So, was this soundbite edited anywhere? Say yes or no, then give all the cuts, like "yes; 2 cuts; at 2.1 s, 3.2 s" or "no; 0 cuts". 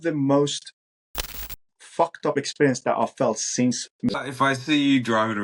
yes; 1 cut; at 4.1 s